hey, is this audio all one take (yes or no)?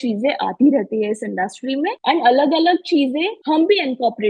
no